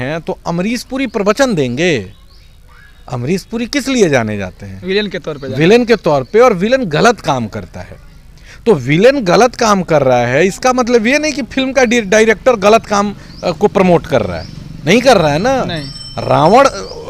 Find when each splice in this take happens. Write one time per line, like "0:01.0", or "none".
none